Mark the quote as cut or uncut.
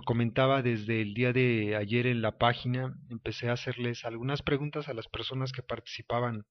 uncut